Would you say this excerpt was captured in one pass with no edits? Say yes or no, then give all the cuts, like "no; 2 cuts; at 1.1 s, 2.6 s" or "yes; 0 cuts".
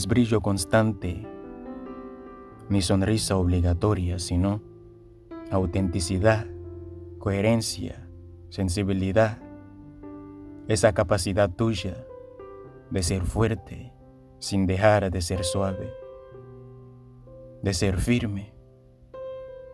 no; 2 cuts; at 0.9 s, 2.6 s